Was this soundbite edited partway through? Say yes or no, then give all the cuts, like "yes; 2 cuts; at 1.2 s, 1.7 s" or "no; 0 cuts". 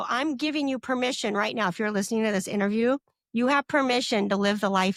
no; 0 cuts